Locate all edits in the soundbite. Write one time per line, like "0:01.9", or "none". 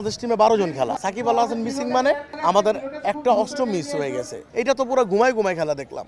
0:01.0
0:04.4